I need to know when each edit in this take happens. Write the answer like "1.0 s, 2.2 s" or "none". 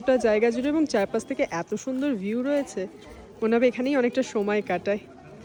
none